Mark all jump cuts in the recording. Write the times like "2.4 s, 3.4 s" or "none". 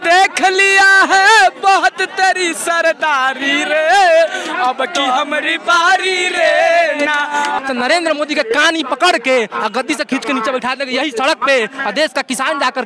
7.6 s